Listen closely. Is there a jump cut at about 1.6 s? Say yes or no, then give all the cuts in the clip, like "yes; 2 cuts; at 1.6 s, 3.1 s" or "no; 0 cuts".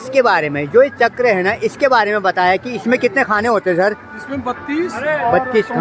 no; 0 cuts